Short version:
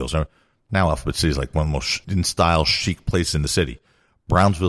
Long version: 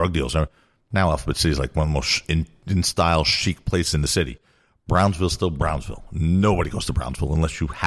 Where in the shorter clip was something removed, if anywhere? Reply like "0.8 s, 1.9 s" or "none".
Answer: 2.0 s